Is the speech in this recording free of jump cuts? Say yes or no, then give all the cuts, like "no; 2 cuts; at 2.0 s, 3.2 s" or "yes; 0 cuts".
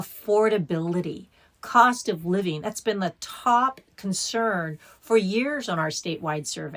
yes; 0 cuts